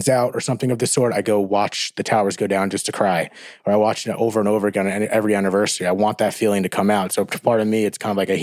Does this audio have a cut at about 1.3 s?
no; 0 cuts

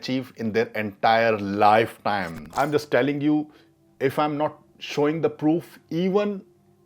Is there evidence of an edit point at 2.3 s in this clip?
yes; 1 cut; at 2.3 s

